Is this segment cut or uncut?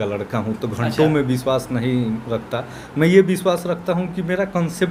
uncut